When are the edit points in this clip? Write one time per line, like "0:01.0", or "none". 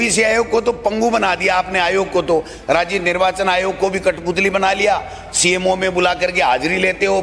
none